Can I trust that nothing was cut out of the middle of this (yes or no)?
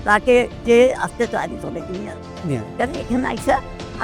yes